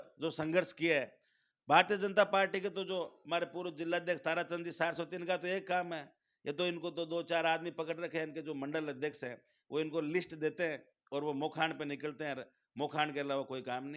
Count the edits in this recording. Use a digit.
0